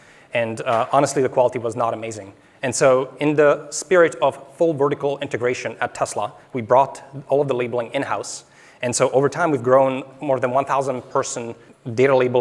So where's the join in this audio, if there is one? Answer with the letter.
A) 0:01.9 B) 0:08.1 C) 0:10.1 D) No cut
D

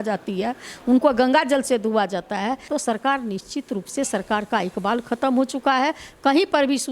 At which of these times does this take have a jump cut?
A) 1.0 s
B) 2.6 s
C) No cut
B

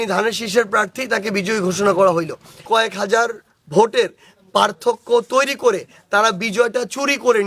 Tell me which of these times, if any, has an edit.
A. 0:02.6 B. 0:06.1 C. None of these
A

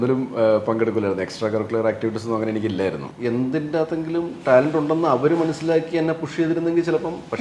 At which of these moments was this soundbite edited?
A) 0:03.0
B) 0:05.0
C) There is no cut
A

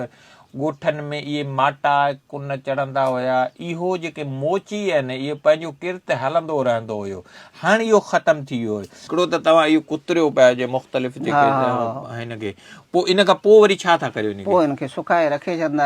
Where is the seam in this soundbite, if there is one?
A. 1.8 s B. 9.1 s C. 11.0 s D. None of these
B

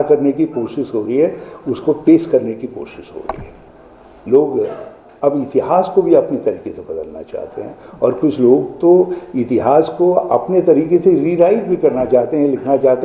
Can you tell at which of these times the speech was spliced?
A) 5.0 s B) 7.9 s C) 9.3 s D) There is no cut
D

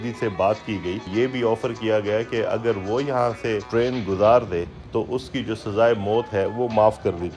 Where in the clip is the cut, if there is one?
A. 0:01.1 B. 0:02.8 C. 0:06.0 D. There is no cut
A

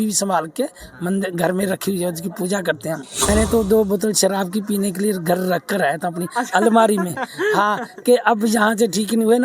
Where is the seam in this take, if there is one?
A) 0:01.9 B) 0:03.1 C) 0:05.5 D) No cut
B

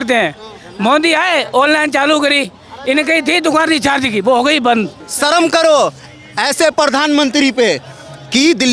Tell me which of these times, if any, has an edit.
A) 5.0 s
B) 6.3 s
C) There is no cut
A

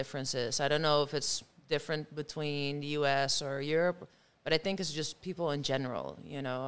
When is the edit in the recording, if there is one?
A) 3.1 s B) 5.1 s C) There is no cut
C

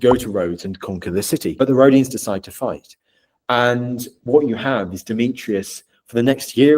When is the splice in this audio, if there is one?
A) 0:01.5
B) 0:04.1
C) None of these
A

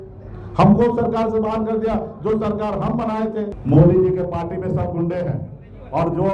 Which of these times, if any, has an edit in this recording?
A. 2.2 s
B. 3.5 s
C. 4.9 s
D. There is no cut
B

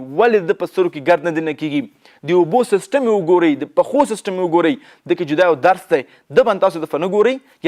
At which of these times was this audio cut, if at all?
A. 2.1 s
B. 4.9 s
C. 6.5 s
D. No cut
D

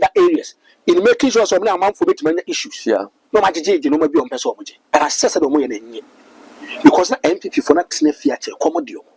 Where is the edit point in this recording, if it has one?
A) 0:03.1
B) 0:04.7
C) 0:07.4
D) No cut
B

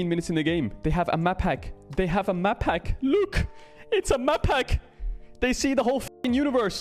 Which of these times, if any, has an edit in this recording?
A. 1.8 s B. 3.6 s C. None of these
C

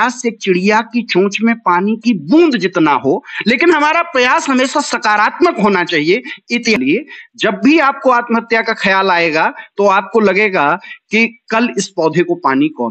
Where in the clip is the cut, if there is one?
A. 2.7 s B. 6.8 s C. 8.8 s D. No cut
B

